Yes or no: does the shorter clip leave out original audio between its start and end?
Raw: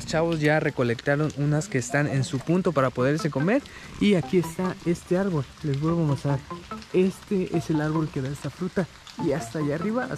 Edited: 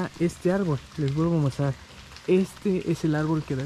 no